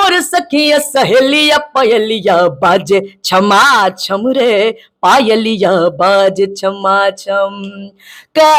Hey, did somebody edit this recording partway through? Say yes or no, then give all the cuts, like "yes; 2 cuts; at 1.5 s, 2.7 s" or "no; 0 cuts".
no; 0 cuts